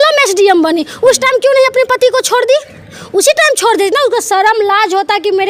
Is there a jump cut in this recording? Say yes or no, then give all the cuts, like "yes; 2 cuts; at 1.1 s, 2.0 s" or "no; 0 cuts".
no; 0 cuts